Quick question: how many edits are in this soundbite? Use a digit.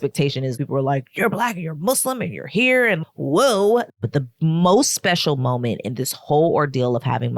1